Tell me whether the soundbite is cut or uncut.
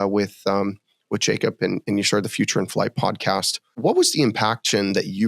cut